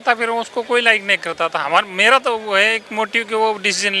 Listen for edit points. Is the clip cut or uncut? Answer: uncut